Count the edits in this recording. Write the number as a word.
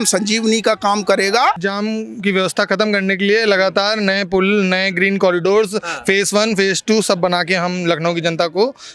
one